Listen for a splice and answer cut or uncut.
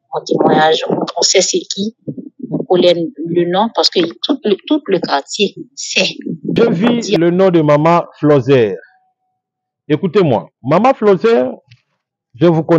cut